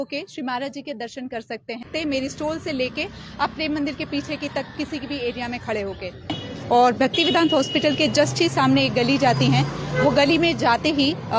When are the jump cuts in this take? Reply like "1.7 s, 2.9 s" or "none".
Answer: 1.9 s, 6.6 s

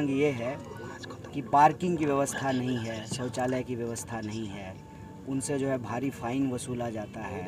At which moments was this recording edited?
none

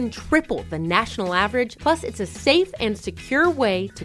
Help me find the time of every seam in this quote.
none

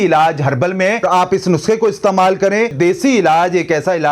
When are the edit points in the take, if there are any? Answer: 1.0 s, 2.7 s

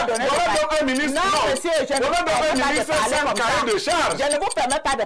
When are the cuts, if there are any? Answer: none

